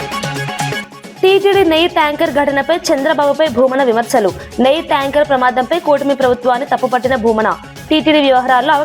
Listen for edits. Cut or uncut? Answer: cut